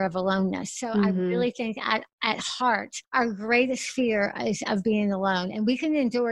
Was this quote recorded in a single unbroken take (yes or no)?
no